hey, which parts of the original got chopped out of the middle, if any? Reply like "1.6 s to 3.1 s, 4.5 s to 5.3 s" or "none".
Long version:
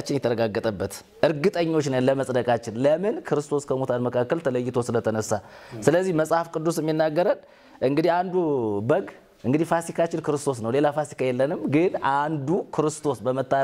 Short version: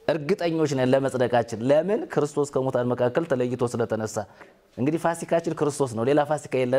5.7 s to 9.2 s